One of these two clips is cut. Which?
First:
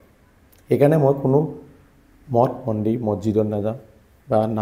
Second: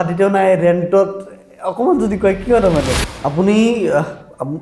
second; 1 cut; at 3.0 s

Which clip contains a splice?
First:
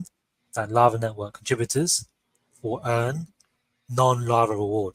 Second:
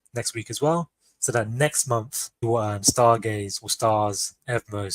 second; 1 cut; at 2.4 s

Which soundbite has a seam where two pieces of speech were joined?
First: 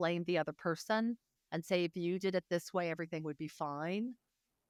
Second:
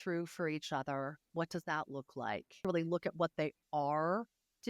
second; 1 cut; at 2.6 s

